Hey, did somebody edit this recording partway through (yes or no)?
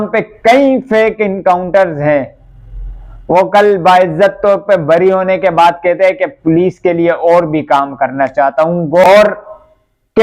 yes